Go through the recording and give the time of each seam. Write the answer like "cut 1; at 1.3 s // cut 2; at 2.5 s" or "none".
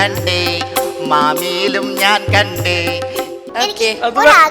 cut 1; at 3.3 s